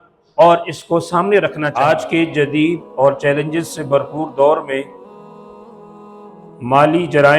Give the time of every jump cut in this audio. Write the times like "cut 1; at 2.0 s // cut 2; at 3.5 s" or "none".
cut 1; at 1.7 s